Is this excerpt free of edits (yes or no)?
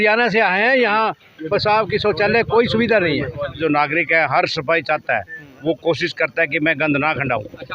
no